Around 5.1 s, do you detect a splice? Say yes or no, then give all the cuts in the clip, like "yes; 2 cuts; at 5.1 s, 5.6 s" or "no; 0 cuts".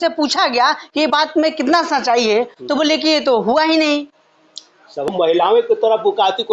yes; 1 cut; at 5.1 s